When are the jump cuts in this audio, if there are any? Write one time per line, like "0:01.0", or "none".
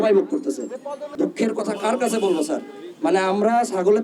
0:01.1